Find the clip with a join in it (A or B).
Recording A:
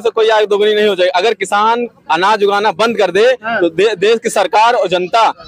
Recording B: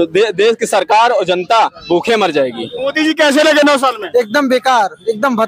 B